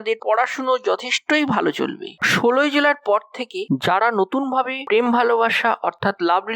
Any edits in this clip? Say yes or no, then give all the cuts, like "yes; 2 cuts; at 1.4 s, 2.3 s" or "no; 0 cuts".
yes; 1 cut; at 2.2 s